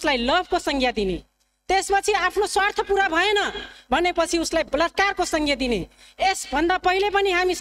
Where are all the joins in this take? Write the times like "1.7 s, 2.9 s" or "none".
none

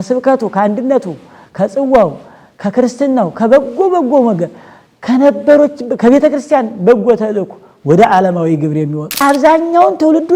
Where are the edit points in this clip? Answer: 9.1 s

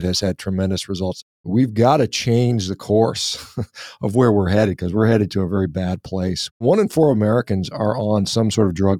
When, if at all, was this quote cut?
1.4 s, 6.6 s

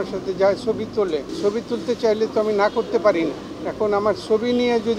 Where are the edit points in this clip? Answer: 1.3 s, 3.5 s

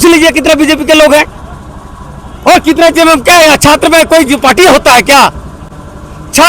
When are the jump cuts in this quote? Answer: none

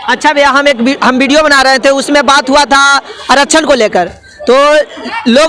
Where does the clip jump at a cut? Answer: none

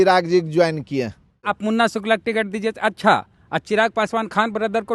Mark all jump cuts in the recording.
1.5 s

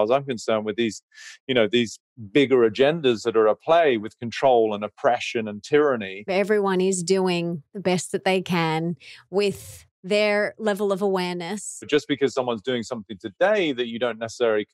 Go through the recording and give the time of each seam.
6.3 s, 11.9 s

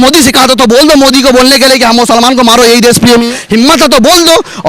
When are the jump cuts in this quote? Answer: 3.3 s

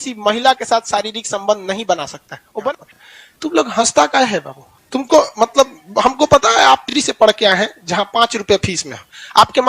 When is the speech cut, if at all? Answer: 2.6 s

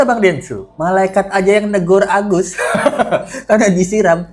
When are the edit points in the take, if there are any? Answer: none

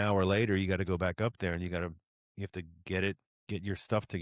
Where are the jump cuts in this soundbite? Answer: 3.3 s

